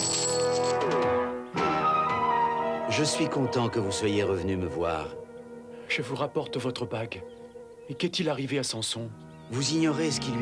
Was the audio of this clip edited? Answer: no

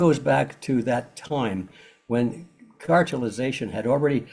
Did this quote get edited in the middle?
no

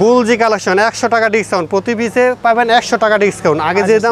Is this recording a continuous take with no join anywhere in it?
yes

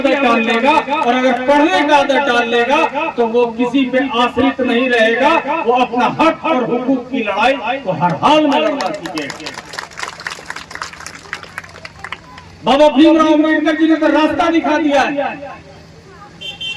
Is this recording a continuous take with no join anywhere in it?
yes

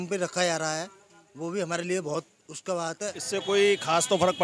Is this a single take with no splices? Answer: no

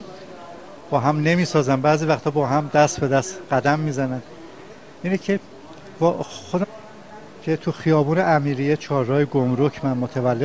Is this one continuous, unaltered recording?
yes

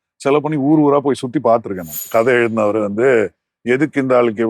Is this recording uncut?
no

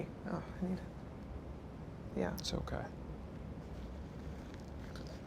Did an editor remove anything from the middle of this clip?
yes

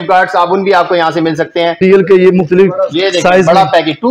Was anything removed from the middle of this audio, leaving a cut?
yes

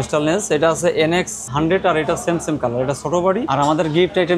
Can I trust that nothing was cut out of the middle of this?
no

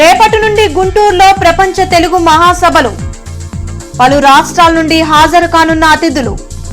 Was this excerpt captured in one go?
yes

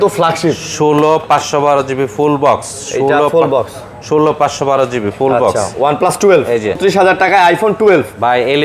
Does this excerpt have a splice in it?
yes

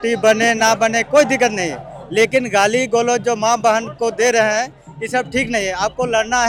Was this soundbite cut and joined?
no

